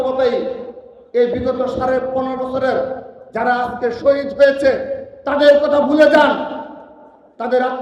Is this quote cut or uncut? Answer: uncut